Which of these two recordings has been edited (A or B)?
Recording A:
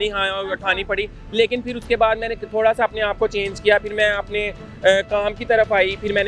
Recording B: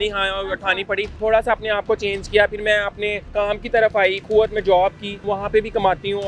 B